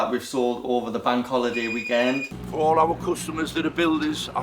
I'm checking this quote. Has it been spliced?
yes; 1 cut; at 2.3 s

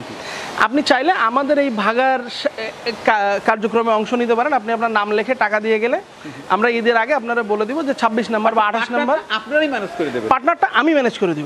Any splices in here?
no; 0 cuts

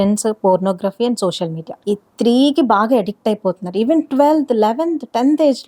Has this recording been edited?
yes; 1 cut; at 1.7 s

